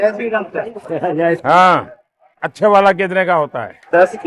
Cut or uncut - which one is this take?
uncut